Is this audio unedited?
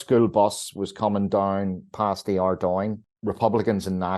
no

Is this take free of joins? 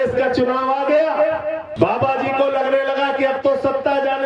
no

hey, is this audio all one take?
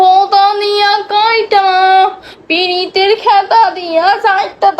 yes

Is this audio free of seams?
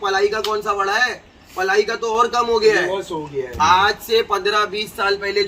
yes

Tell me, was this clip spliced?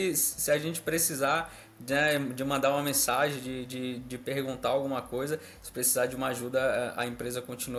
no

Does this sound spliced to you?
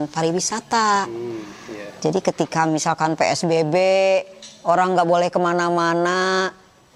no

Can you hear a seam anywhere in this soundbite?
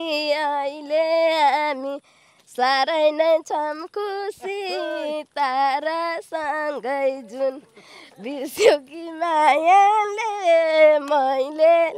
no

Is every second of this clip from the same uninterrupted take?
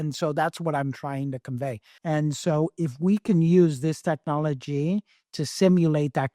no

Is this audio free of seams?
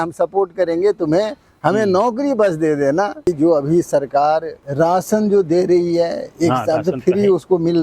no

